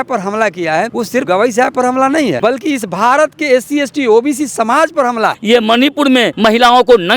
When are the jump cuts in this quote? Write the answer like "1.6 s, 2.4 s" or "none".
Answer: 1.2 s, 2.4 s, 5.4 s, 6.3 s